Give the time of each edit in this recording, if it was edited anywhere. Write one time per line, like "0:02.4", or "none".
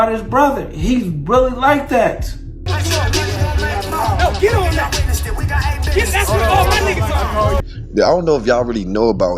0:02.7
0:07.6